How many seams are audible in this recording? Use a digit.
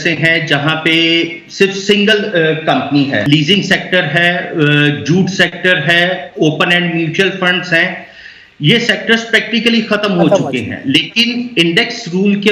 1